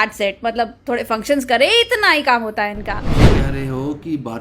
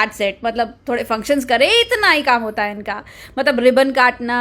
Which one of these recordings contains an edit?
first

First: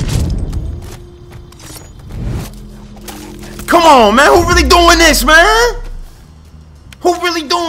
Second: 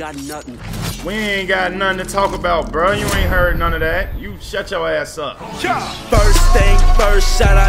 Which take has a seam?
second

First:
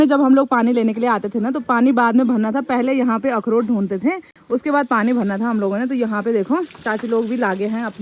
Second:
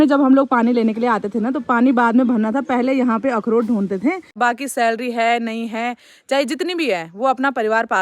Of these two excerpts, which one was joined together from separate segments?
second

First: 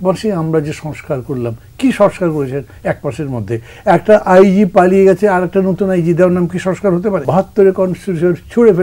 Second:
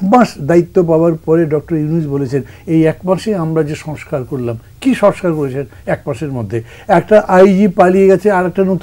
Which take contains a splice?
first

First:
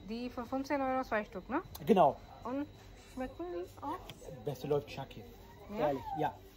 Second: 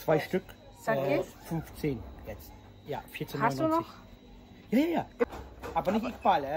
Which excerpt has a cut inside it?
second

